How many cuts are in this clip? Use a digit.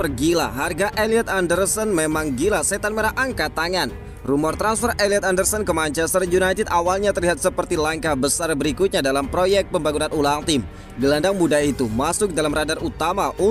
0